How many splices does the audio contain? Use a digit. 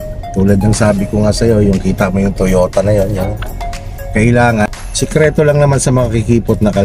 1